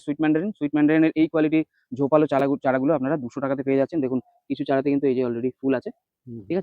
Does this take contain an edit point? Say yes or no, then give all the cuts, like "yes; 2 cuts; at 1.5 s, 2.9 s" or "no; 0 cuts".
no; 0 cuts